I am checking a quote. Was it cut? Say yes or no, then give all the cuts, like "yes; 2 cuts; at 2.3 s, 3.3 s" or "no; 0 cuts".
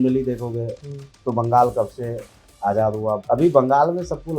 yes; 1 cut; at 3.2 s